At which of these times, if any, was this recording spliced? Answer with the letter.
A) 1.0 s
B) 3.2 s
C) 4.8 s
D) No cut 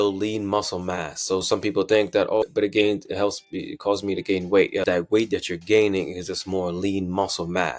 C